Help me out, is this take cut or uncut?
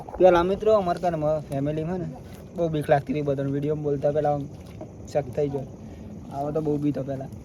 uncut